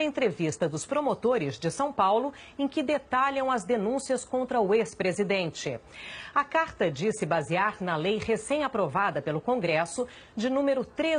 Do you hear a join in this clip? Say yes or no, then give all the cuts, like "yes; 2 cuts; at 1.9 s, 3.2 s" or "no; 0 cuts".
no; 0 cuts